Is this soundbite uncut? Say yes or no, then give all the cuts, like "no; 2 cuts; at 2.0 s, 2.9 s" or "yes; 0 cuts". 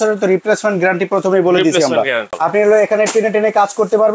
no; 1 cut; at 2.3 s